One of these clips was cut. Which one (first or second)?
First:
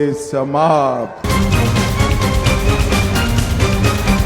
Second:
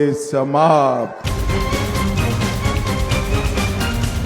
first